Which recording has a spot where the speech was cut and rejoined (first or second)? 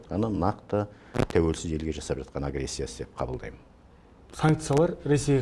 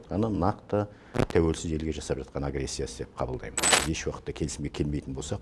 second